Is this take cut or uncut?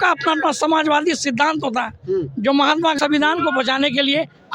cut